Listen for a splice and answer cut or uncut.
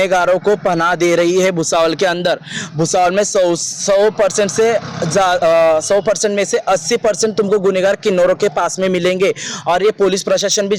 uncut